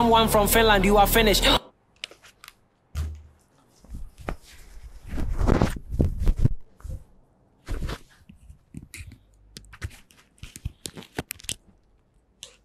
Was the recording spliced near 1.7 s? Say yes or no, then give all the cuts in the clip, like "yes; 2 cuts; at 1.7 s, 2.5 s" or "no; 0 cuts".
yes; 1 cut; at 1.7 s